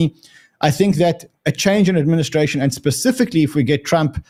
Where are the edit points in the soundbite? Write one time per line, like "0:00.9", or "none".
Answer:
none